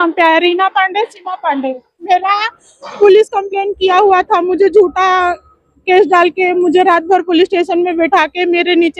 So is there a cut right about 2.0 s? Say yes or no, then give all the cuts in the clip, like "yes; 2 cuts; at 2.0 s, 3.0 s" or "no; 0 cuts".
yes; 1 cut; at 2.0 s